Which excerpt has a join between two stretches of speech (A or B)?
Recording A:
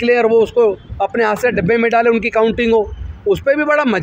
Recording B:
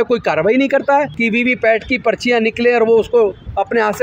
B